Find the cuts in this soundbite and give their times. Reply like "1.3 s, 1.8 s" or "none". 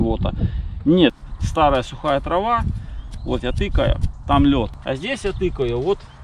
1.2 s, 4.8 s